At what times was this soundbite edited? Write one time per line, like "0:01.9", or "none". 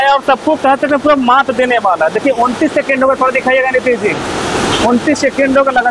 none